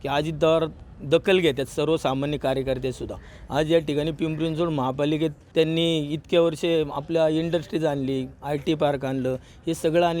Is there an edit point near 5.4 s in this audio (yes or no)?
yes